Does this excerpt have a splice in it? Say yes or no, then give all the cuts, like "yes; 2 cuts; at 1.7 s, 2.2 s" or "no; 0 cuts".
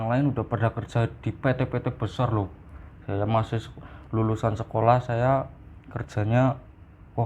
no; 0 cuts